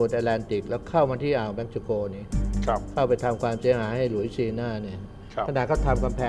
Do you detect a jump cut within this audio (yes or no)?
no